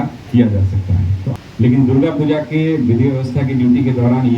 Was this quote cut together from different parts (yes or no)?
yes